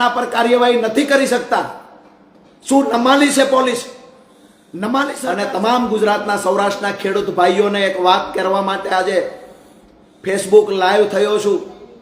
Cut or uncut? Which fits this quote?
cut